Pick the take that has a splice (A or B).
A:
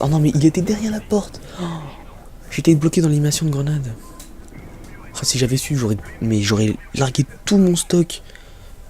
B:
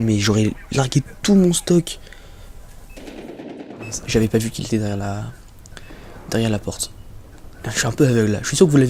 A